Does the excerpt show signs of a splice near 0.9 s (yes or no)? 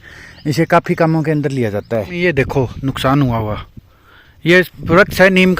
no